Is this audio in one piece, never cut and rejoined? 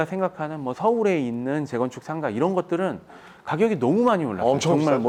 yes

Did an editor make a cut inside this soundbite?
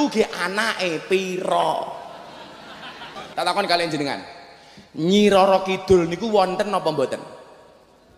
yes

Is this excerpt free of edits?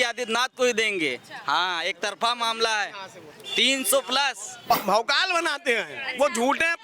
no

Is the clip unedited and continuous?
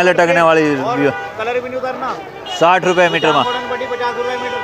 yes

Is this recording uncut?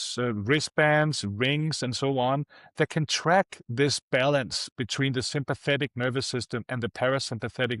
yes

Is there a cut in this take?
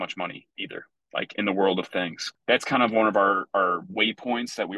yes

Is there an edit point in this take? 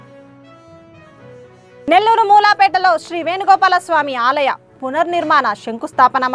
no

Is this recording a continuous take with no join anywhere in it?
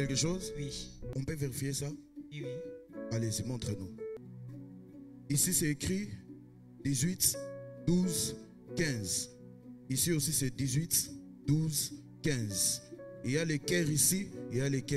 no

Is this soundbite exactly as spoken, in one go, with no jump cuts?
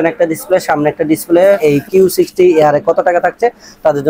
no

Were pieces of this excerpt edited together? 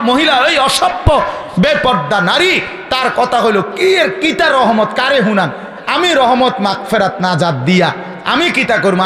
no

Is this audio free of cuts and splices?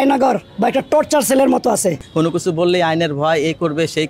no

